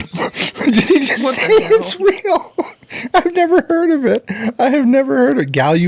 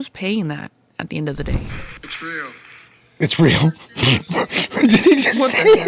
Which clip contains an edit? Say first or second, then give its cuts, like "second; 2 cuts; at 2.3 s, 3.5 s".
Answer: second; 1 cut; at 1.7 s